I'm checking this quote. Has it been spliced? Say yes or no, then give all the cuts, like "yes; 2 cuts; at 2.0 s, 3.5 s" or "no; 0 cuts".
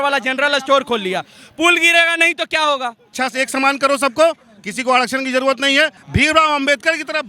yes; 2 cuts; at 3.0 s, 6.0 s